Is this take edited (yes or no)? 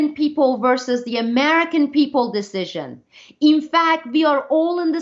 no